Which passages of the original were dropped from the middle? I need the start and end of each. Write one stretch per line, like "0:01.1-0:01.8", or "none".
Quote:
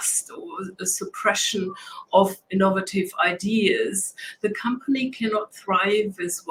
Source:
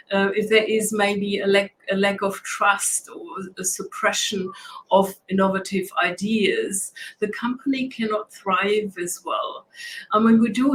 none